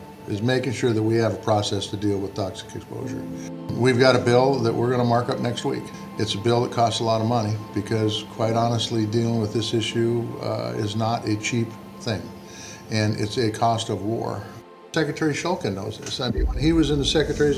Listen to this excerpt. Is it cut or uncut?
cut